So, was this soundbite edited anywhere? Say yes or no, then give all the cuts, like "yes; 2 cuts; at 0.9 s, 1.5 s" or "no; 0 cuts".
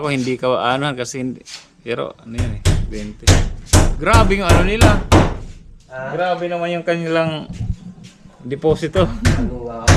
no; 0 cuts